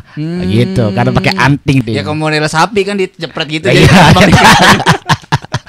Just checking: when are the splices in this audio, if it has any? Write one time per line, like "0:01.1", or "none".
0:01.8